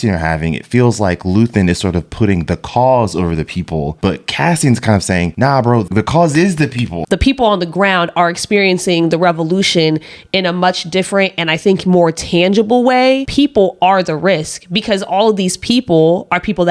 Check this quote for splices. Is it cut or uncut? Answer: cut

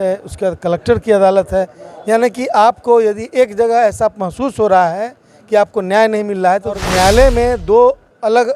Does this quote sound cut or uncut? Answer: cut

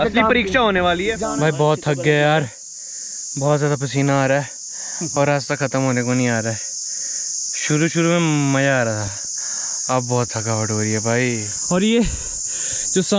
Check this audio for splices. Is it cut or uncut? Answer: cut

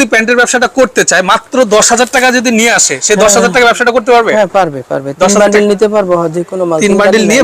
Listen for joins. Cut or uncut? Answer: uncut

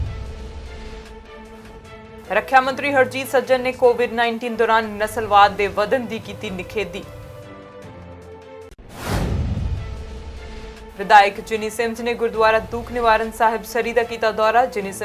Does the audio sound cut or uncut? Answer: cut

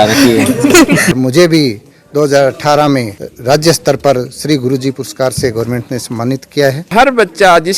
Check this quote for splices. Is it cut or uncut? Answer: cut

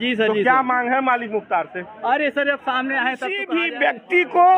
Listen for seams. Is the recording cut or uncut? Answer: cut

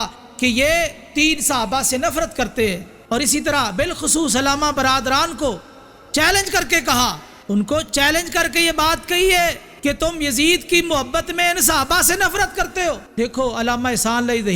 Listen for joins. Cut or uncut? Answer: cut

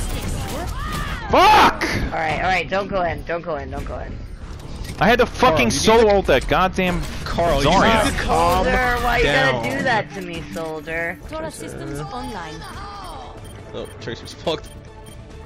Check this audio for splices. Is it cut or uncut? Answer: cut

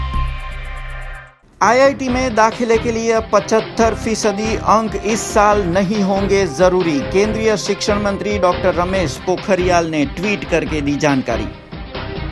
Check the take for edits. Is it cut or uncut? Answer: cut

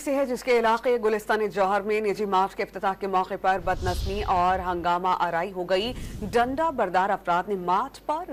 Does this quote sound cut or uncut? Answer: uncut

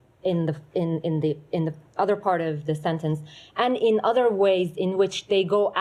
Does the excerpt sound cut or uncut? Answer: uncut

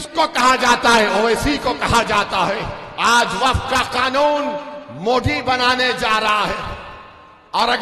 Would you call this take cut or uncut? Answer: cut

